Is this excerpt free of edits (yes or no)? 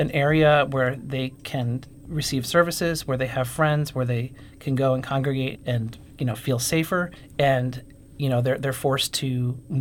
no